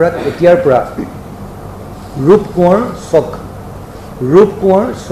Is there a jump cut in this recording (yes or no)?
yes